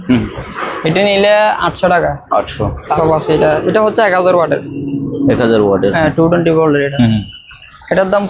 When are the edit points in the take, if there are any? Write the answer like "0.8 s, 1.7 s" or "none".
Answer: 3.0 s